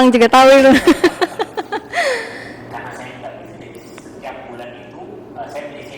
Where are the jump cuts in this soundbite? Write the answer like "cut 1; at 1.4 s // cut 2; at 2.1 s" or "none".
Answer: none